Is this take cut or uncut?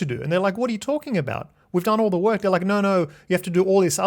uncut